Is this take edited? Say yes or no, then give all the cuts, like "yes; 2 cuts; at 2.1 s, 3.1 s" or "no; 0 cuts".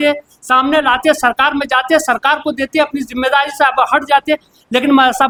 no; 0 cuts